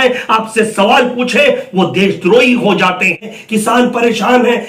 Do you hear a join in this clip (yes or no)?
yes